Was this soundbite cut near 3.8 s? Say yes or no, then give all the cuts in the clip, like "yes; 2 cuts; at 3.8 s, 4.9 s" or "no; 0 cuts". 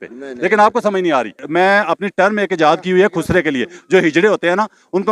no; 1 cut; at 1.4 s